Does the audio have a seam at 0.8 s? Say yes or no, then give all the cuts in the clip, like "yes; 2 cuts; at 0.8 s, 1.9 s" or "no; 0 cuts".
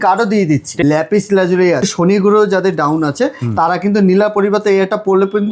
yes; 2 cuts; at 0.8 s, 1.9 s